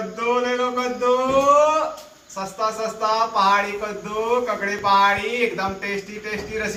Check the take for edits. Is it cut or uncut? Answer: uncut